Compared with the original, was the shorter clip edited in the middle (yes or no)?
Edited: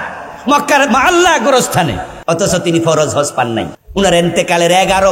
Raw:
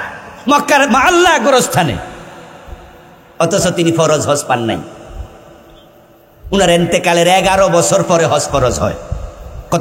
yes